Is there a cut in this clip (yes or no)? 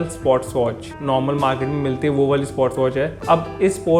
no